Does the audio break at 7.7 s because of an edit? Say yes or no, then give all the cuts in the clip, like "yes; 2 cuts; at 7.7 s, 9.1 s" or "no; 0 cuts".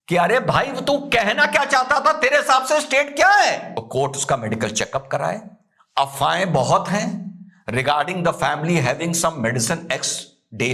no; 1 cut; at 3.8 s